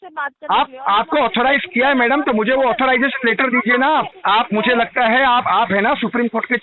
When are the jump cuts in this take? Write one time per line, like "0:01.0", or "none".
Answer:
0:04.1